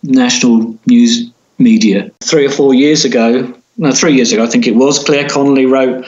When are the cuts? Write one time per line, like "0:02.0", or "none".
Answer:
0:02.2